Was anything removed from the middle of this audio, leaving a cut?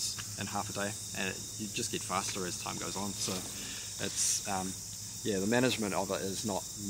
no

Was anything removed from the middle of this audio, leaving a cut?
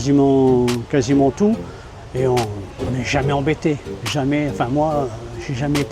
no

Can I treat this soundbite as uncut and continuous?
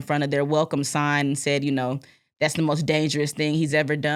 yes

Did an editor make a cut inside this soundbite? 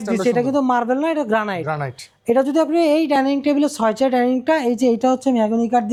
no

